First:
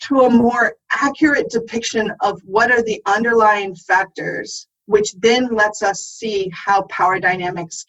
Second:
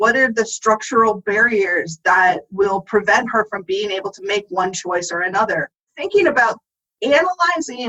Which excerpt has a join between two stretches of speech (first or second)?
second